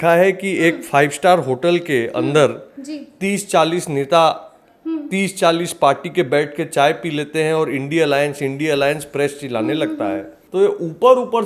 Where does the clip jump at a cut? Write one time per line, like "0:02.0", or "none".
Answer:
0:10.3